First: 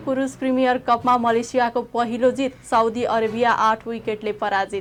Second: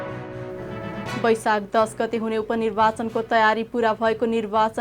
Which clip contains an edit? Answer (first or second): second